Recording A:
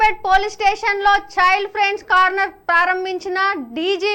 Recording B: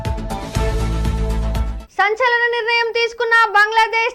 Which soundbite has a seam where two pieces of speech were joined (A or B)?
B